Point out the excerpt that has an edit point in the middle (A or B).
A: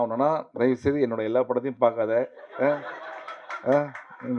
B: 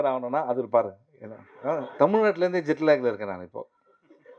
B